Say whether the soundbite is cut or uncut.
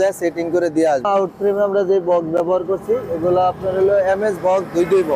cut